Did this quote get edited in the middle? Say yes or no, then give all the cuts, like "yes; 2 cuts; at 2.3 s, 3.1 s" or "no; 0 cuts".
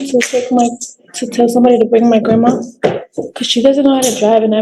no; 0 cuts